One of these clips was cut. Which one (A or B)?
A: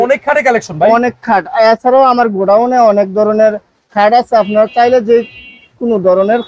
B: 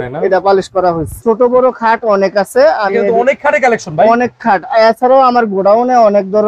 B